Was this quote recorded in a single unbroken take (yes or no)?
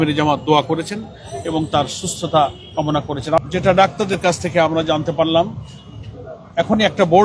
no